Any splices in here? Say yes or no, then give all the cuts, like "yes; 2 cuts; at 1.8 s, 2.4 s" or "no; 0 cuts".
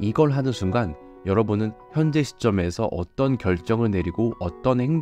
no; 0 cuts